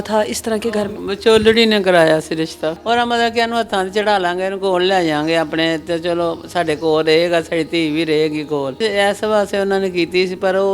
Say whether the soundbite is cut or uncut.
cut